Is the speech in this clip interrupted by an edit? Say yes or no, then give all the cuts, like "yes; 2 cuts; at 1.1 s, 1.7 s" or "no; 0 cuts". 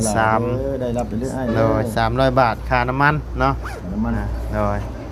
no; 0 cuts